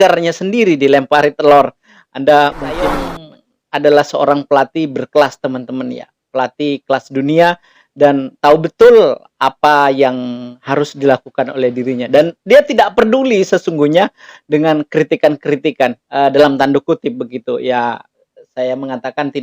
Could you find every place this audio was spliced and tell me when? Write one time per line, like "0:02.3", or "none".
0:03.0